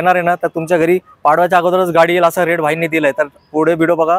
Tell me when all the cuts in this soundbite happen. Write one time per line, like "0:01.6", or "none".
none